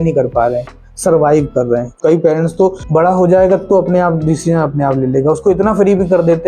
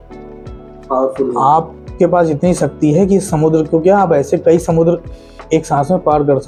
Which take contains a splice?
first; 2 cuts; at 1.9 s, 2.8 s

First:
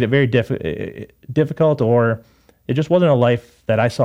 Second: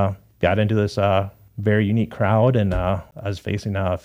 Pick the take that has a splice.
second; 2 cuts; at 1.4 s, 3.1 s

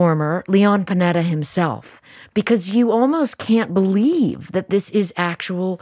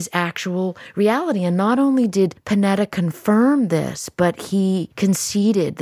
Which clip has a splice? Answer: second; 2 cuts; at 2.4 s, 4.9 s

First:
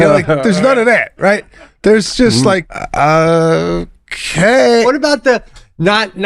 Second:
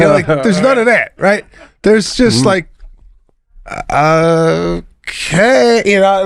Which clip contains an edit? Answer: first; 2 cuts; at 2.8 s, 4.8 s

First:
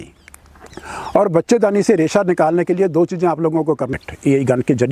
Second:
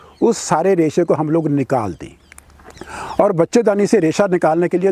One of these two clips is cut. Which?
first; 1 cut; at 3.9 s

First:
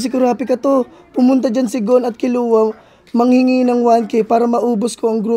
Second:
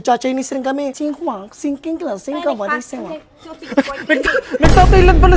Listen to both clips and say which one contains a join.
second; 1 cut; at 0.9 s

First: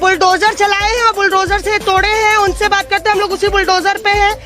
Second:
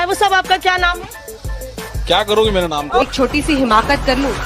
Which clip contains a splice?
second; 1 cut; at 2.9 s

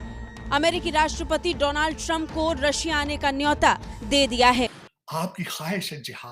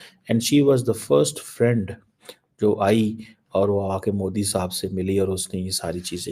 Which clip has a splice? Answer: first; 1 cut; at 4.8 s

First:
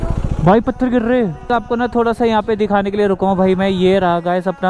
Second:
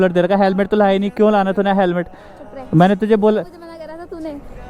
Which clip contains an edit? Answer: first; 1 cut; at 1.5 s

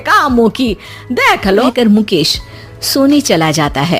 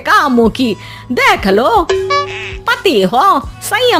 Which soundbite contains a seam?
first; 1 cut; at 1.6 s

